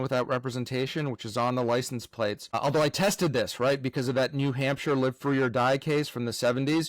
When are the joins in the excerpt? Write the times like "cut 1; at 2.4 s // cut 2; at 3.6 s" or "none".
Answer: cut 1; at 2.5 s